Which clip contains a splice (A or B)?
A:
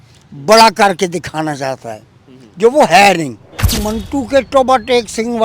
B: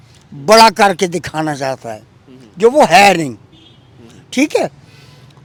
A